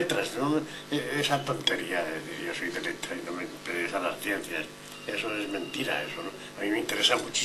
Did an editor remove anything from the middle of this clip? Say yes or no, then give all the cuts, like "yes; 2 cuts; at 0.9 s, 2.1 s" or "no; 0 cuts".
no; 0 cuts